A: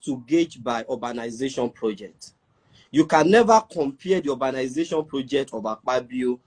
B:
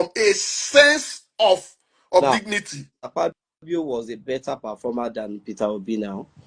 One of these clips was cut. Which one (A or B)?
B